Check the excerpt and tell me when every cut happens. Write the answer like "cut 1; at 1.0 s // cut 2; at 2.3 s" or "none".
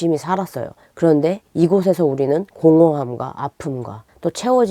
cut 1; at 2.5 s